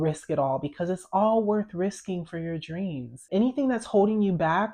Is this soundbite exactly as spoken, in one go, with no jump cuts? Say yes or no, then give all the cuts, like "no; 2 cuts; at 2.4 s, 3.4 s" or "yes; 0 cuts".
no; 1 cut; at 3.3 s